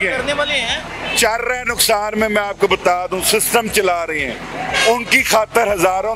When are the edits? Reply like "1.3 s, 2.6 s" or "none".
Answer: none